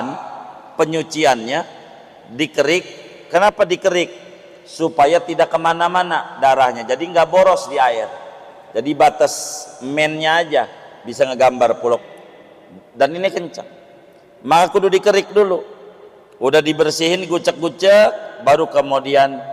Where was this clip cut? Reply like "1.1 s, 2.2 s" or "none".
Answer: 12.0 s